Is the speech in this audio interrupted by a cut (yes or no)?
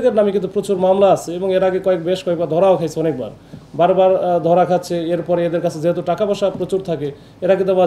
no